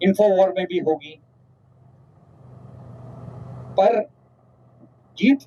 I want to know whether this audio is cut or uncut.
uncut